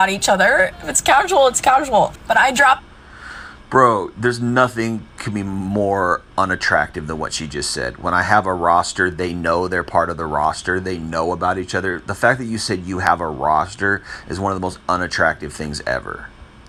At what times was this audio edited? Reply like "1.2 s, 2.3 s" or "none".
none